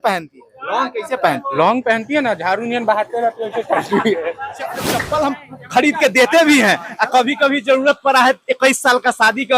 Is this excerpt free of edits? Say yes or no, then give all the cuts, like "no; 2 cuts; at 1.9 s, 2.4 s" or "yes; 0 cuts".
no; 1 cut; at 4.9 s